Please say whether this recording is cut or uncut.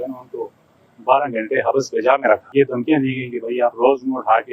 cut